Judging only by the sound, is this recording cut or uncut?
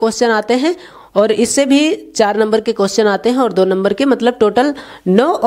uncut